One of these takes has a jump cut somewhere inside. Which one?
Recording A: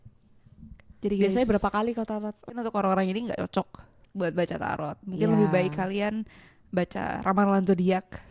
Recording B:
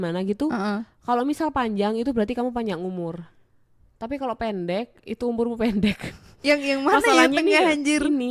A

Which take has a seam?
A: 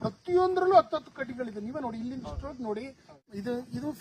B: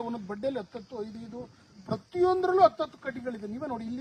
A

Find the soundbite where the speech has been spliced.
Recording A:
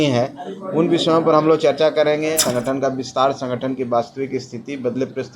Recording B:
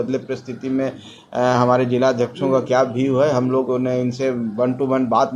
A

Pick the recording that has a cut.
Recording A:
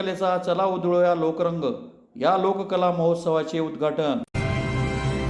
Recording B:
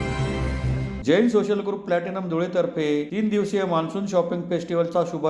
B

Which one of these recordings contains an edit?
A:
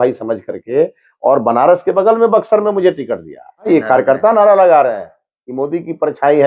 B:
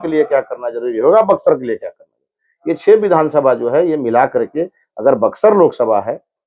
A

